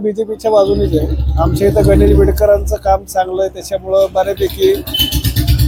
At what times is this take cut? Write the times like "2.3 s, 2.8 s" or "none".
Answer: none